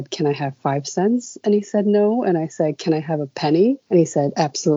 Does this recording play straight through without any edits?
no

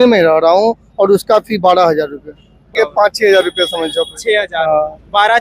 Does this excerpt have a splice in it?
yes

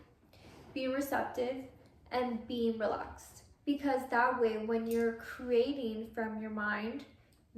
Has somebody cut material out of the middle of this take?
no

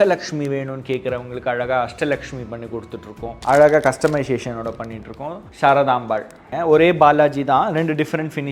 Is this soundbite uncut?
no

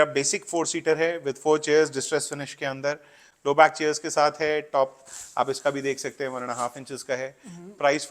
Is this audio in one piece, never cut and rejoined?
yes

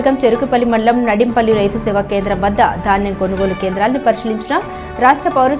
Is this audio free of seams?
yes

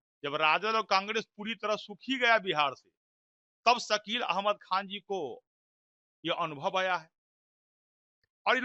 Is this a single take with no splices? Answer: yes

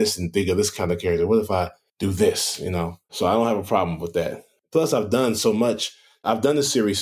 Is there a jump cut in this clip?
no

